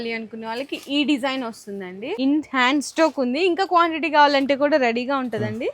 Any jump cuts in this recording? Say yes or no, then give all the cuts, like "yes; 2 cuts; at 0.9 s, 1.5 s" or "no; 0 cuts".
yes; 1 cut; at 2.0 s